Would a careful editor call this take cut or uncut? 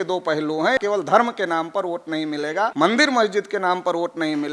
cut